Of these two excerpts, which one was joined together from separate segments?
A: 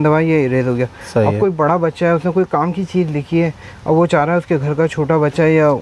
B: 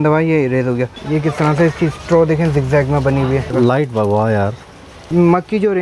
B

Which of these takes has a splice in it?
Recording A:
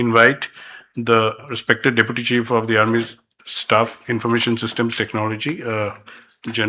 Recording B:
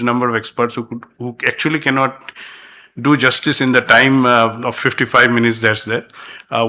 A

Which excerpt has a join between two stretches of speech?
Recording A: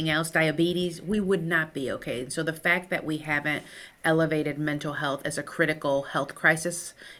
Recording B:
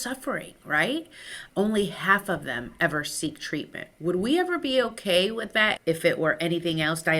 B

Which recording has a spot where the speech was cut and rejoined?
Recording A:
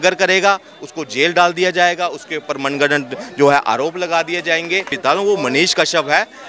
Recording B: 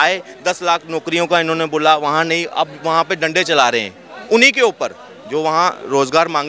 A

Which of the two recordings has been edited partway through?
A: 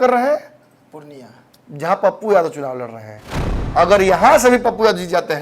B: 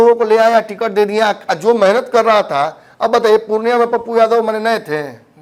A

